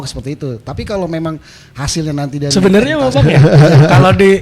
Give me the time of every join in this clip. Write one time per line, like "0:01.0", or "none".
0:02.5